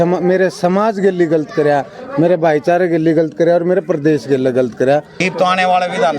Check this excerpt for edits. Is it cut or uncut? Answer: cut